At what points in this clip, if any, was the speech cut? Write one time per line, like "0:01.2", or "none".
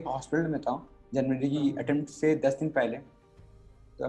none